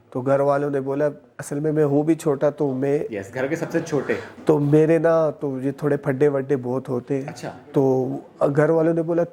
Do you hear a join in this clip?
no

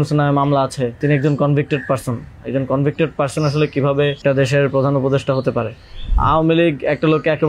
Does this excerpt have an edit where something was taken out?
yes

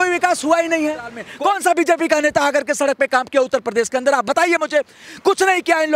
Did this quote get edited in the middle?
yes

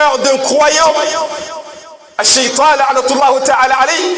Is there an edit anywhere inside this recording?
no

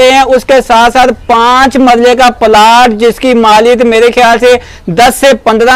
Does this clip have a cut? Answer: no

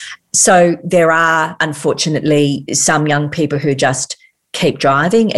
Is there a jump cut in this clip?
yes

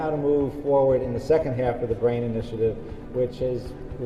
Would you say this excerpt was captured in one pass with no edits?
yes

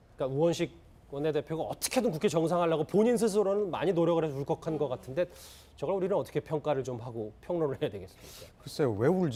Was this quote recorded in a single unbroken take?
yes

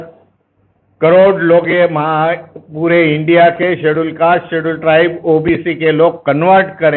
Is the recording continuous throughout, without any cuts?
yes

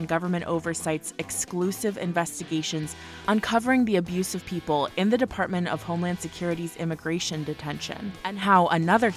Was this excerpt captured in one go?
no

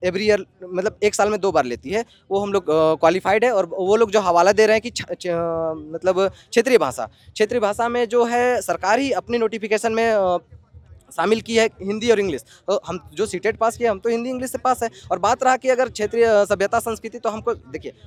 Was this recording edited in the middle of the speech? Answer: no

